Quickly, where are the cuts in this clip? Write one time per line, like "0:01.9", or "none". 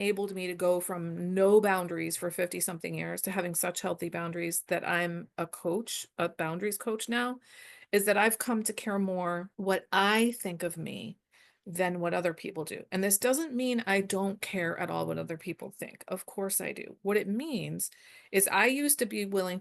0:09.5